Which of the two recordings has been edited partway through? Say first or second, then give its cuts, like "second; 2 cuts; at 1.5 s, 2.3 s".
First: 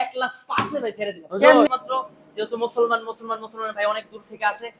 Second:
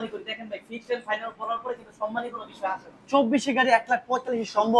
first; 1 cut; at 1.7 s